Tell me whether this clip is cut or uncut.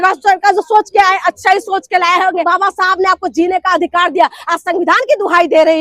cut